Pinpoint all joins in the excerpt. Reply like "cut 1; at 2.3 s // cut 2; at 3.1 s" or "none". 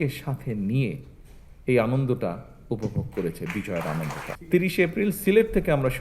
cut 1; at 4.3 s